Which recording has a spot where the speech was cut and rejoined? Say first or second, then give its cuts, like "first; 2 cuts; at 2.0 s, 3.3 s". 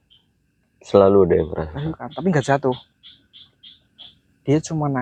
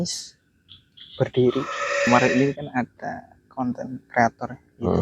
second; 1 cut; at 2.1 s